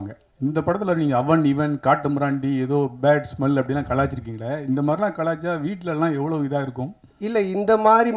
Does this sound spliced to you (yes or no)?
no